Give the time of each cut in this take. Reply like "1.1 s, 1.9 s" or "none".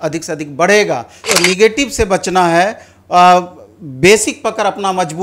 1.3 s

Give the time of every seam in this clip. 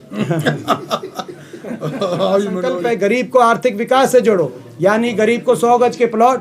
2.7 s

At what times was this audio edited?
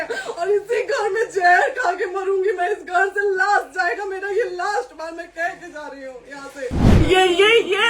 6.9 s

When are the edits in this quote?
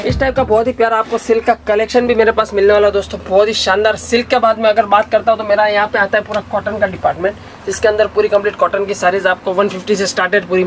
none

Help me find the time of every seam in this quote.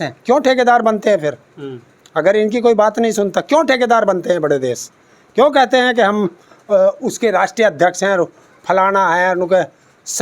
none

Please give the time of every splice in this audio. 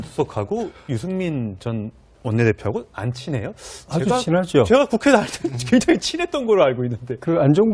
none

